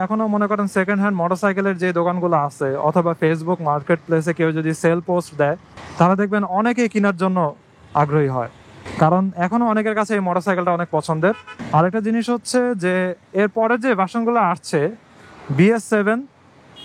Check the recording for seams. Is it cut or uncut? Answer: uncut